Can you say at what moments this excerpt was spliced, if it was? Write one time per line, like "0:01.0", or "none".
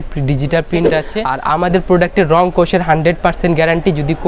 0:01.2